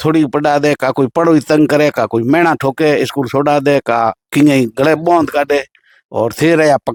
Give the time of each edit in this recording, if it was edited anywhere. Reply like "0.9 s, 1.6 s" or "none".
none

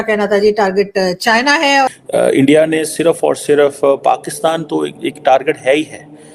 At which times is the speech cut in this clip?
1.9 s

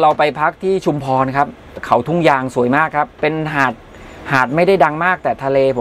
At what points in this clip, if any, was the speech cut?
1.8 s

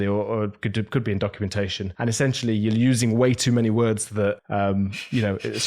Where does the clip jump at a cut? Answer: 1.8 s, 4.4 s

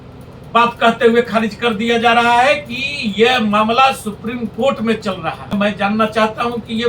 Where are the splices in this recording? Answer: 5.5 s

